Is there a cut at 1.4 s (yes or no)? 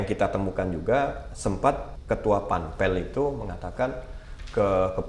yes